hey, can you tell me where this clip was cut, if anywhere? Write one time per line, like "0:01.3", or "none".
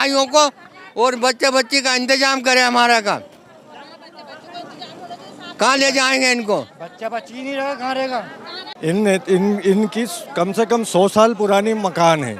none